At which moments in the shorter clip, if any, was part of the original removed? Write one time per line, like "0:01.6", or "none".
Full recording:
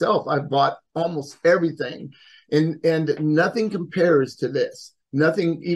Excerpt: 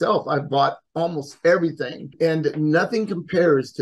0:02.1

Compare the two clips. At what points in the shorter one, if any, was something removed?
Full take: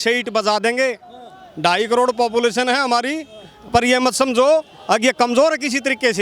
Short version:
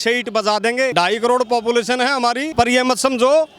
0:00.9
0:02.5

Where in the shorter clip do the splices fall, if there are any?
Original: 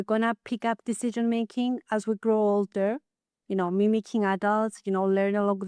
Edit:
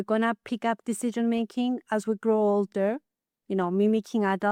none

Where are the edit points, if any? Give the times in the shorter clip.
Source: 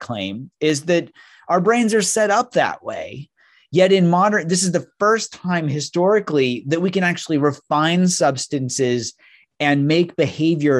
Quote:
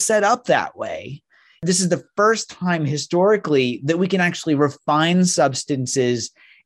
0:01.6

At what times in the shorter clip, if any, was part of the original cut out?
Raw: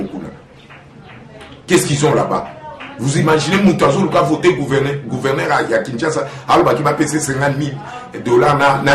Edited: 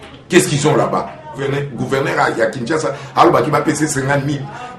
0:01.4

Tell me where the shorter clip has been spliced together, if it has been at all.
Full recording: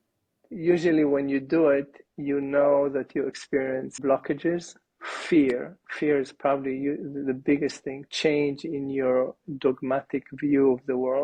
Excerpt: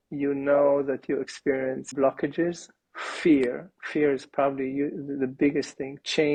none

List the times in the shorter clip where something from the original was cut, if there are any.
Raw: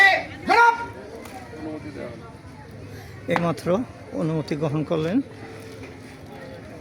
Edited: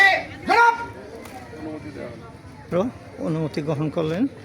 0:02.7

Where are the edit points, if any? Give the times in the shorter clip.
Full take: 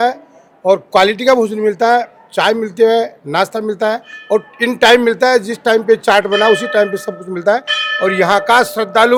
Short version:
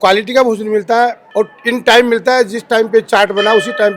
0:01.2

